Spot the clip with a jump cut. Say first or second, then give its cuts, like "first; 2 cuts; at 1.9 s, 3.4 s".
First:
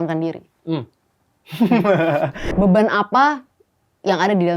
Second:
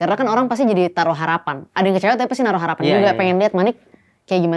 first; 1 cut; at 2.4 s